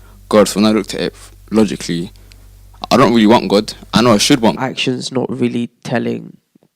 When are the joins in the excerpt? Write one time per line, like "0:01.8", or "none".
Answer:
0:04.6

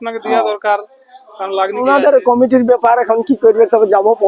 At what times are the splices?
0:01.8

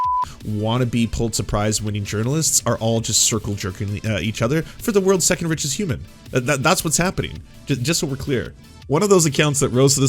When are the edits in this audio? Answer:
0:08.8

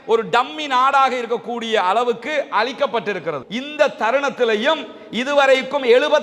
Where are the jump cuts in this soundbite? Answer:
0:03.5

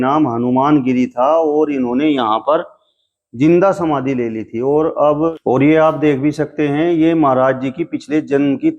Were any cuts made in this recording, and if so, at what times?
0:05.4

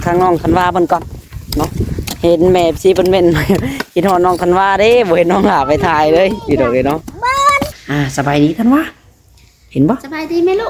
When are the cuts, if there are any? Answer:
0:07.8

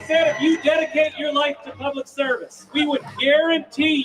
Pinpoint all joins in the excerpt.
0:02.7

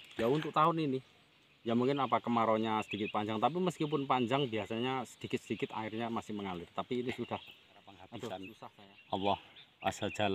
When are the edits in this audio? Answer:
0:08.6

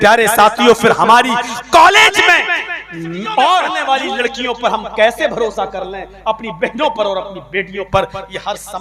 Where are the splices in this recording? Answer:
0:03.8

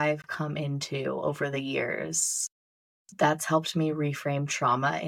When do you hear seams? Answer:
none

